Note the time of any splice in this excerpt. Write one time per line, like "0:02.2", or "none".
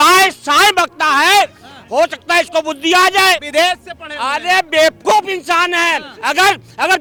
none

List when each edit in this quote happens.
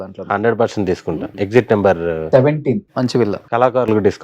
0:01.3
0:03.4

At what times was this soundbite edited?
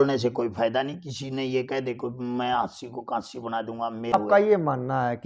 0:04.1

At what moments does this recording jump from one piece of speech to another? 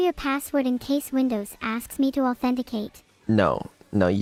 none

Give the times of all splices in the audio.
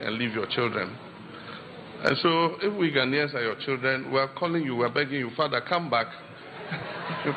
none

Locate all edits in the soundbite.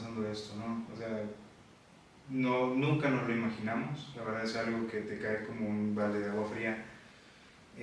none

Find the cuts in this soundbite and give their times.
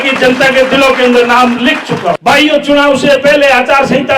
0:02.2

